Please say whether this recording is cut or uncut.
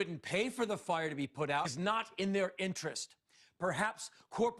uncut